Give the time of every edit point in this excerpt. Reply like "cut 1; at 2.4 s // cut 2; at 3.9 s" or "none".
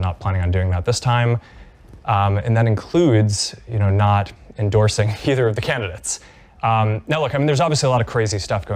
cut 1; at 7.4 s